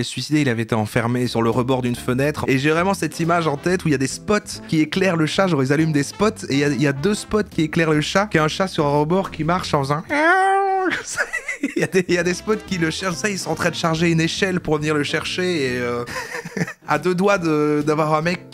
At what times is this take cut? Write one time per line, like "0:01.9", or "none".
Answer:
0:02.4

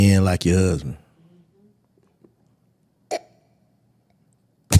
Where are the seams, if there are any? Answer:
none

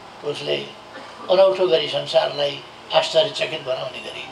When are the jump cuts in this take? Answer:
none

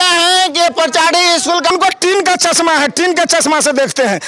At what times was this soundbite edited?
0:01.7

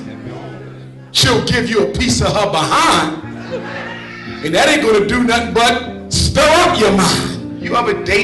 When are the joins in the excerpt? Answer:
0:07.3

